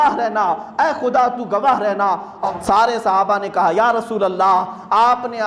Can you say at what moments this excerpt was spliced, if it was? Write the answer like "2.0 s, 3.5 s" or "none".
2.4 s

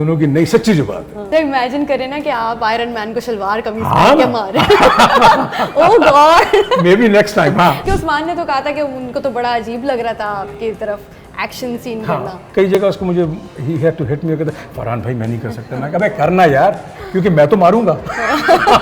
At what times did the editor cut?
1.3 s, 7.8 s, 12.4 s

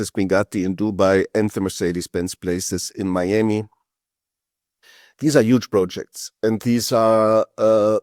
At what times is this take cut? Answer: none

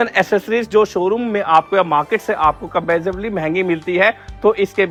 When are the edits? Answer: none

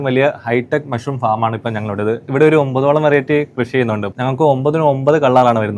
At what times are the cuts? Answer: 2.2 s, 4.1 s

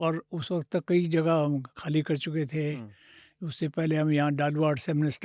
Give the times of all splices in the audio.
none

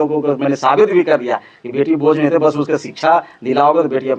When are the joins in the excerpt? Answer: none

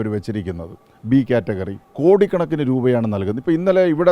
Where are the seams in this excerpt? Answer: 1.8 s

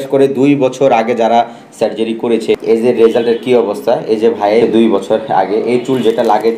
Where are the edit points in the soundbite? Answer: 4.6 s

